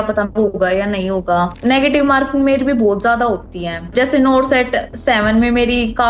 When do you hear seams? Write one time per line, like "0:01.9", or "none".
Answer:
0:01.6
0:03.9